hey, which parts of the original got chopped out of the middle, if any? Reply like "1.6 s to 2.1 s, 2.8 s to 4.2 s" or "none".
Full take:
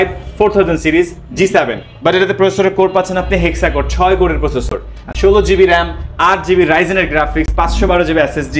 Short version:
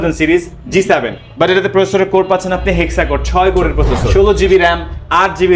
4.7 s to 5.1 s